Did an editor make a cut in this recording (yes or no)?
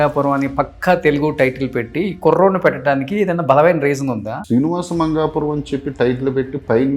yes